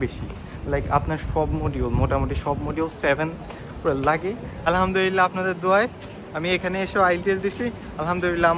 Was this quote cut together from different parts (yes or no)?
yes